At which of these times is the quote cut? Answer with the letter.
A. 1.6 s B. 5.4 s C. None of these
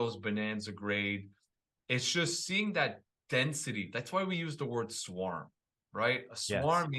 C